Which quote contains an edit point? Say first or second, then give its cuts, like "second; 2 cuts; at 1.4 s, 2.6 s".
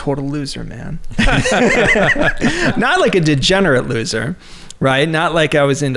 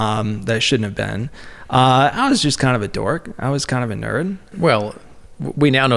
second; 1 cut; at 4.5 s